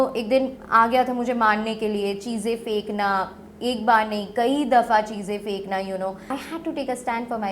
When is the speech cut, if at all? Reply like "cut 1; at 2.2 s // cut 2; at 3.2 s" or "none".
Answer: cut 1; at 6.3 s